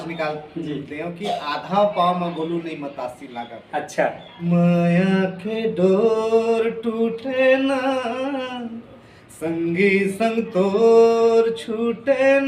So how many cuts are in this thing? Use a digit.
1